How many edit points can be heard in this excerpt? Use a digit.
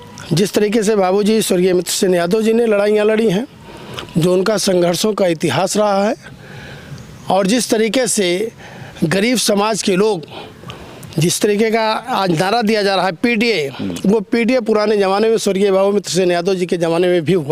0